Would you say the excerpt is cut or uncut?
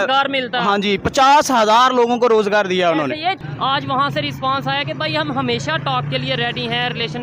cut